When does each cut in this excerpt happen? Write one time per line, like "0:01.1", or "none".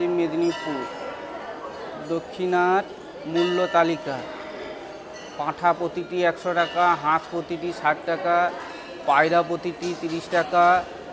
none